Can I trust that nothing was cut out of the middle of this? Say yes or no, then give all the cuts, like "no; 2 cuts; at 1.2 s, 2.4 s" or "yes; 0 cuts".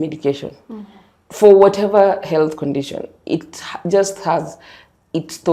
yes; 0 cuts